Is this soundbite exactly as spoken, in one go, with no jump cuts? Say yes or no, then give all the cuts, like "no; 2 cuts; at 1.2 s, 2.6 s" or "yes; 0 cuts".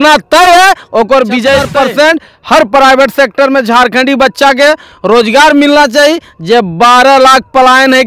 no; 1 cut; at 1.7 s